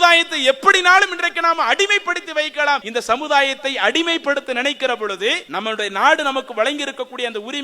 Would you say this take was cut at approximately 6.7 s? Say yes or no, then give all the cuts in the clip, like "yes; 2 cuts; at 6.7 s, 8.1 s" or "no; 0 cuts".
no; 2 cuts; at 2.9 s, 5.4 s